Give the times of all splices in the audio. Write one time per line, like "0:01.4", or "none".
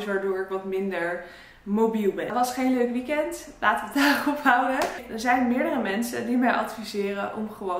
0:02.3
0:05.1

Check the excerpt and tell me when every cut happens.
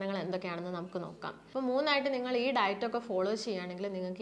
0:01.4

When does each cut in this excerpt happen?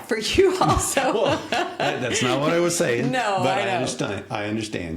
none

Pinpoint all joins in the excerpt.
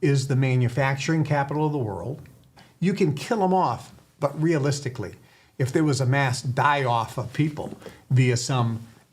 0:02.6

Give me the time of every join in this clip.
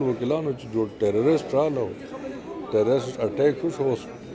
none

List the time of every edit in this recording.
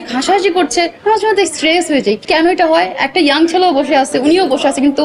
0:02.2

